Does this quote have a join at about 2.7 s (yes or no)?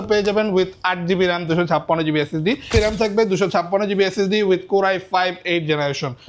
yes